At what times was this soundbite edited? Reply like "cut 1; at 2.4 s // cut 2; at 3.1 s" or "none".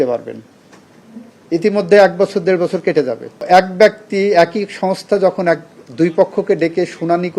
cut 1; at 3.4 s

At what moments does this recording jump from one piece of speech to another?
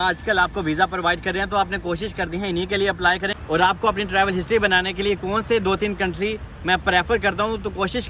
cut 1; at 3.3 s

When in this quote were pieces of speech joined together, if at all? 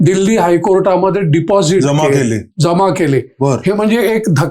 none

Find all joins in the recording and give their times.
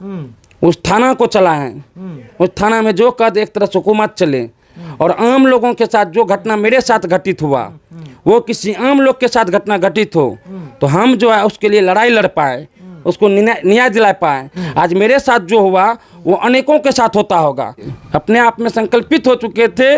none

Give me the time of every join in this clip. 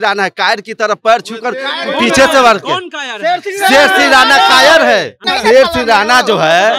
cut 1; at 5.2 s

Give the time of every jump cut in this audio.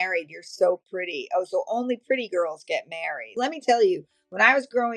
cut 1; at 3.3 s

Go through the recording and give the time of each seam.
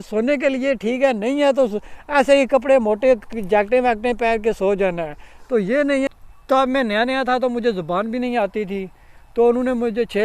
cut 1; at 6.1 s

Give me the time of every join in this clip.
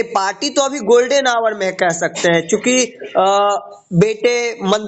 none

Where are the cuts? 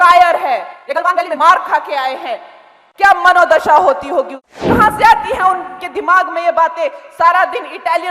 cut 1; at 4.4 s

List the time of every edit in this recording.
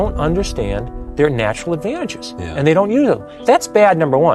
cut 1; at 3.3 s

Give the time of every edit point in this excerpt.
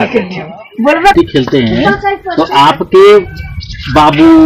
cut 1; at 1.1 s

